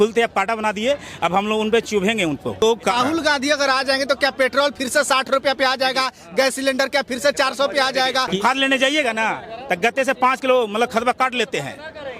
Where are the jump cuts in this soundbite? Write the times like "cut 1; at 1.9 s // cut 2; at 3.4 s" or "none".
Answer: cut 1; at 2.9 s // cut 2; at 8.4 s